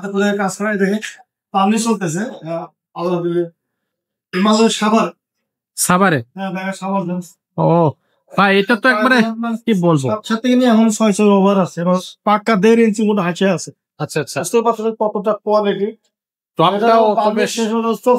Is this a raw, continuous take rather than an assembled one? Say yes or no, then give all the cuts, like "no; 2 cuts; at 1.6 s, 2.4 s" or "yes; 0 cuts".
yes; 0 cuts